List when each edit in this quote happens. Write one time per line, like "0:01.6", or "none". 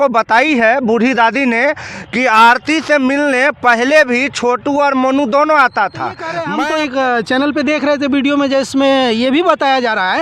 0:06.3